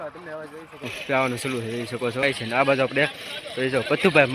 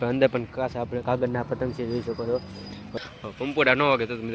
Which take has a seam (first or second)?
second